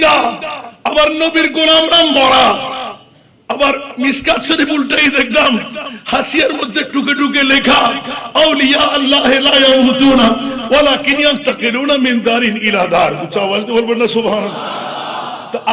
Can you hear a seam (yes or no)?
no